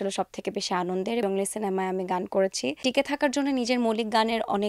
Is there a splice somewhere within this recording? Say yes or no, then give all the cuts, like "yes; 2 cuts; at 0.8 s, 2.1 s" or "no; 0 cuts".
yes; 2 cuts; at 1.2 s, 2.8 s